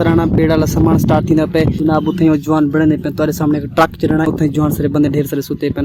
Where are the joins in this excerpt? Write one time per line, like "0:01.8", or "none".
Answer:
0:01.8
0:04.3